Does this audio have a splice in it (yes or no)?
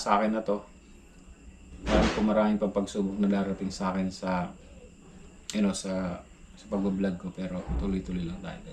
no